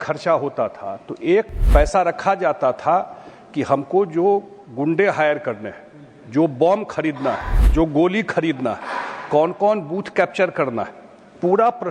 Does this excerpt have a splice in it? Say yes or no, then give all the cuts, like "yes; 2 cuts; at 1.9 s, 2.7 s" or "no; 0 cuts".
yes; 2 cuts; at 1.6 s, 7.5 s